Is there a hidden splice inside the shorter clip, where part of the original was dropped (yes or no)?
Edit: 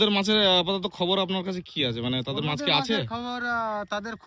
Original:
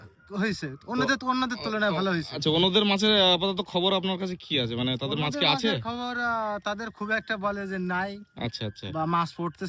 no